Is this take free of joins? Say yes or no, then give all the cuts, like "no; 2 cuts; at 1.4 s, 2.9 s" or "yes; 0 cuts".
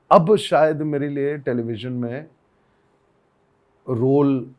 yes; 0 cuts